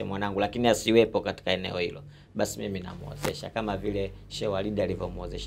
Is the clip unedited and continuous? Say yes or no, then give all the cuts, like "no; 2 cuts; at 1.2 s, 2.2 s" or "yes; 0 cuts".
yes; 0 cuts